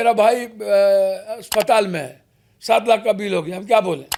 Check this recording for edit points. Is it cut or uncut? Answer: uncut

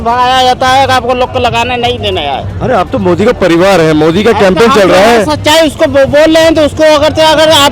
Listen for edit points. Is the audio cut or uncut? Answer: uncut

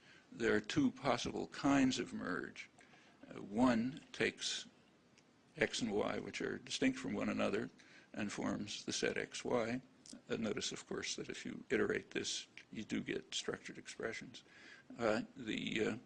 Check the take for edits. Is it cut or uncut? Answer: uncut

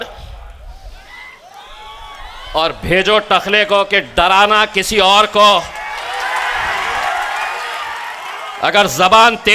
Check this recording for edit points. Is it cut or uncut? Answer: uncut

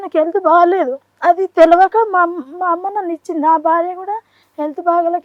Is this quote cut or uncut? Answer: uncut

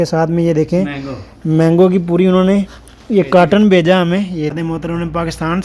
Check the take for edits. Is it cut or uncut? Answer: cut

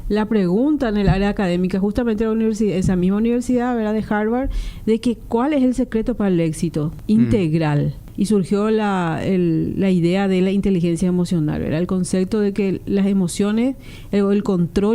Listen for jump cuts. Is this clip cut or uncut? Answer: cut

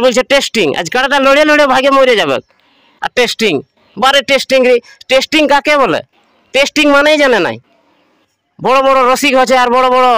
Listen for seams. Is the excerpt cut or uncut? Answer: uncut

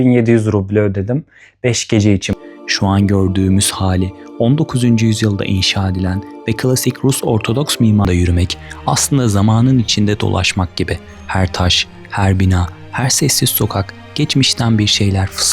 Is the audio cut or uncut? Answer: cut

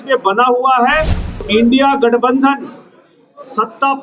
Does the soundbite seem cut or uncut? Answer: cut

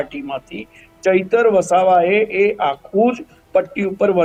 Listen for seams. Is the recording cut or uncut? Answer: uncut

